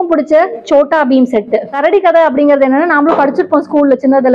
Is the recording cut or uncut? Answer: cut